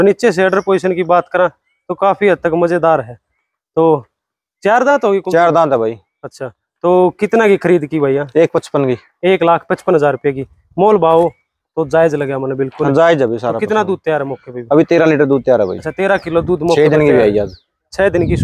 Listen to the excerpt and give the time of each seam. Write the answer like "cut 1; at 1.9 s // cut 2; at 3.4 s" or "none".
none